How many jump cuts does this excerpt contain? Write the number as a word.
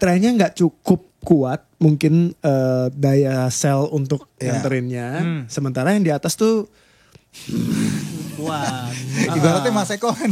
zero